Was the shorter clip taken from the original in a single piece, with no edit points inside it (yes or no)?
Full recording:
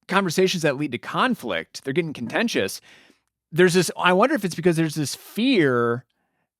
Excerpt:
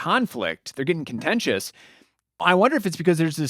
no